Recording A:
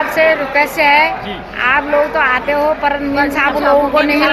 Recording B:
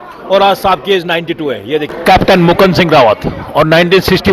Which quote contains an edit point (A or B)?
B